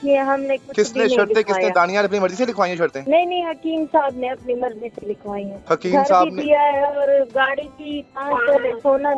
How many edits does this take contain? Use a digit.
0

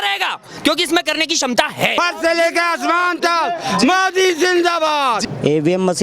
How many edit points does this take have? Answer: 2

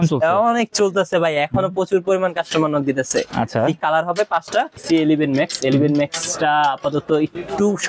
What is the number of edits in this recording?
2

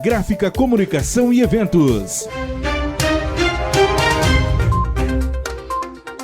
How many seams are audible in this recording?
1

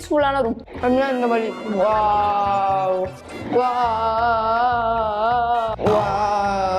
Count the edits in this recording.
2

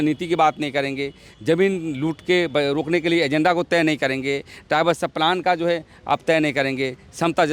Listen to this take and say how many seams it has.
0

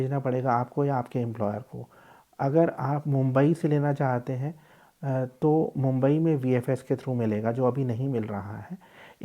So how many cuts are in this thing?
0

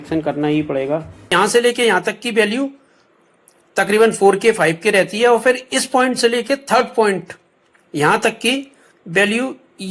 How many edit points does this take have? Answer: 1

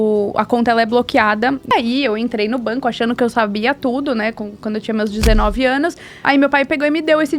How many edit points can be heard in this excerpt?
2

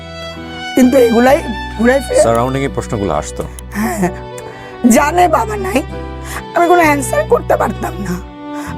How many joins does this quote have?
1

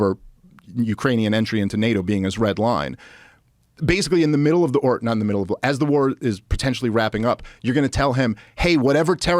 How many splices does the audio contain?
0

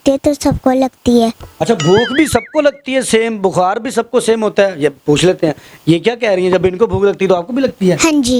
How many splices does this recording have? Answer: 0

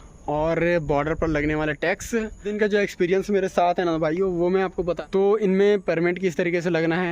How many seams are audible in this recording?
2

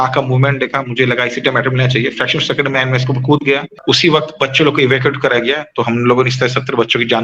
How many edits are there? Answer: 1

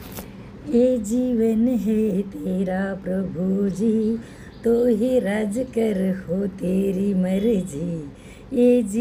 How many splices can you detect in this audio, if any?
0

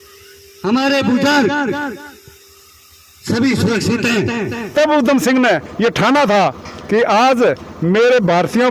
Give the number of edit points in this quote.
1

